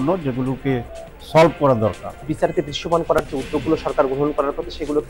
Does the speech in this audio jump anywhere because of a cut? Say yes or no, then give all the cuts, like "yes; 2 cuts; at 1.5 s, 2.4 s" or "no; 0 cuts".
yes; 1 cut; at 2.3 s